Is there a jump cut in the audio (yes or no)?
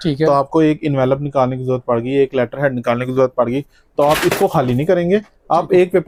no